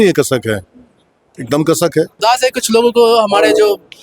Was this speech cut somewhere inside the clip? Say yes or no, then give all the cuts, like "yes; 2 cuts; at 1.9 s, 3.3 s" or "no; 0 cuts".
yes; 1 cut; at 2.1 s